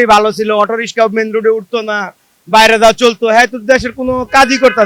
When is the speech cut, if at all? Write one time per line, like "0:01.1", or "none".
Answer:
none